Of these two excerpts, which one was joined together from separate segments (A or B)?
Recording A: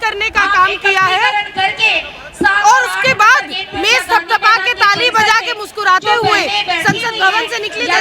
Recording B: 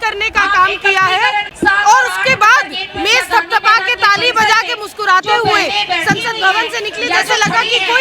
B